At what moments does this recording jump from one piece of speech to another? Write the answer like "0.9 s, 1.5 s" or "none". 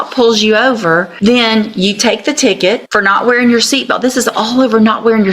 1.1 s, 2.8 s

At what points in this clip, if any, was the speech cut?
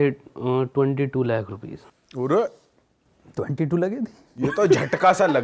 none

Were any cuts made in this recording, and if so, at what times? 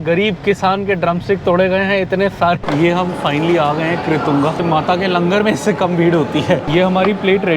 2.6 s, 4.6 s, 6.7 s

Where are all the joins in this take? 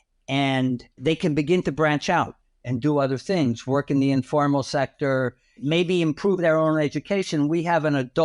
1.0 s, 5.6 s

